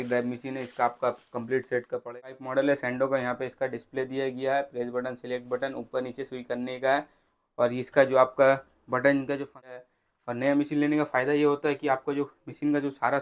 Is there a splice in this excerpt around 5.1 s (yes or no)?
no